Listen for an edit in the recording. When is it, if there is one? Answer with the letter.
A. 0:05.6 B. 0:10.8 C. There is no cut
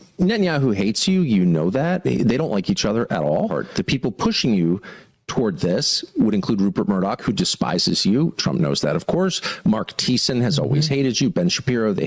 C